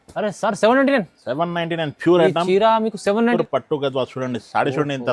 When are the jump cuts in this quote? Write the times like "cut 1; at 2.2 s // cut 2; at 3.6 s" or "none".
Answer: cut 1; at 3.4 s